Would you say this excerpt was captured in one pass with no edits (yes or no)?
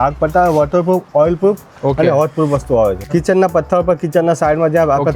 no